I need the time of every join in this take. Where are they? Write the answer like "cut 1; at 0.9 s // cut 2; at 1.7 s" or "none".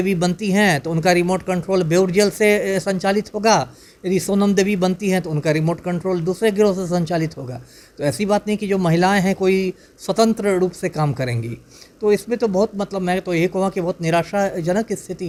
none